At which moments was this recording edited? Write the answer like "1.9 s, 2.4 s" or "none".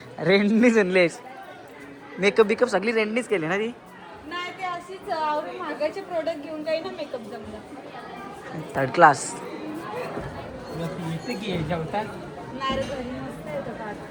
none